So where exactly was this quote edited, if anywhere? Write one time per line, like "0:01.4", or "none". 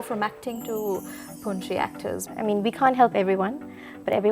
0:02.2